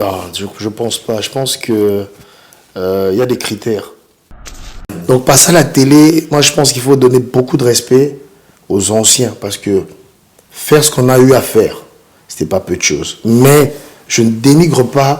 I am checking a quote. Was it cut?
yes; 1 cut; at 4.5 s

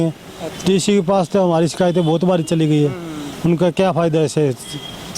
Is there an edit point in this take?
no; 0 cuts

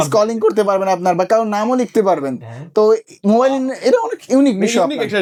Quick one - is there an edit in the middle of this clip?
no; 0 cuts

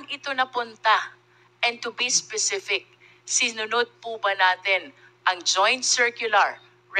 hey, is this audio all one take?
yes; 0 cuts

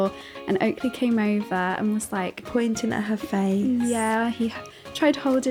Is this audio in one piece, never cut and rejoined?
yes; 0 cuts

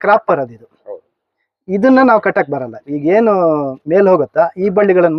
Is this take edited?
no; 0 cuts

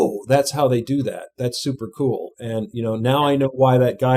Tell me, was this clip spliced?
no; 0 cuts

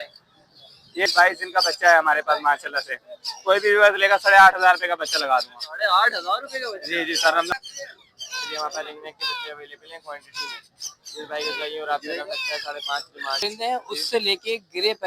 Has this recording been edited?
yes; 3 cuts; at 1.1 s, 7.5 s, 13.4 s

